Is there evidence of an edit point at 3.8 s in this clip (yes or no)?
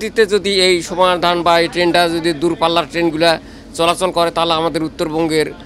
no